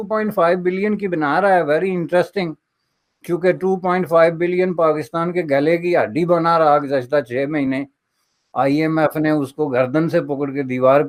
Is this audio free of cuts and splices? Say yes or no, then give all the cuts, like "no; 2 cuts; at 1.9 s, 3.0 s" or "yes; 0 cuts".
yes; 0 cuts